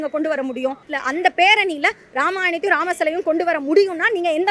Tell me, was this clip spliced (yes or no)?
yes